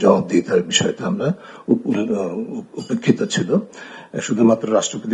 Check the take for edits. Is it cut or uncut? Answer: uncut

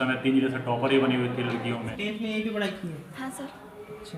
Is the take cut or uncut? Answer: cut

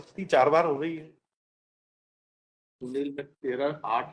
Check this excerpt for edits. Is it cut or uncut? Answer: uncut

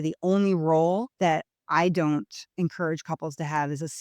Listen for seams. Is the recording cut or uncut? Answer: cut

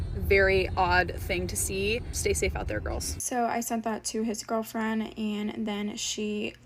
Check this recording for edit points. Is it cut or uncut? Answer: cut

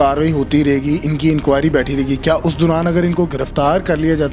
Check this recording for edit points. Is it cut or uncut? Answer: uncut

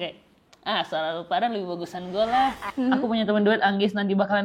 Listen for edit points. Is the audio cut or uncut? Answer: cut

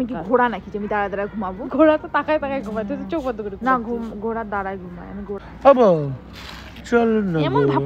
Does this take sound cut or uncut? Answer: cut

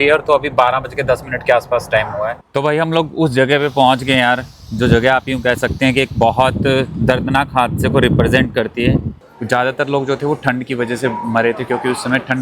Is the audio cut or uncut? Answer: cut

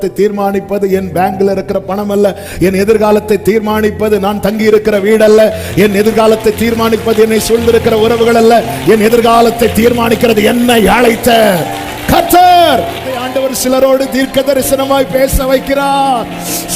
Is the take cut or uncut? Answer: uncut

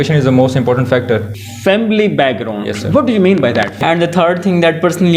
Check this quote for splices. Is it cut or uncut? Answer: cut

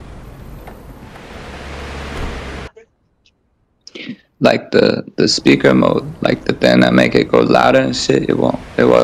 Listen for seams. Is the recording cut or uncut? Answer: cut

